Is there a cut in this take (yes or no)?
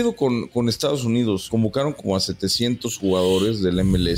yes